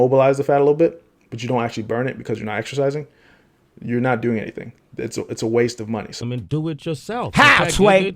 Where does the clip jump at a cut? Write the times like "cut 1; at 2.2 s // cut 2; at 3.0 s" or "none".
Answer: cut 1; at 6.2 s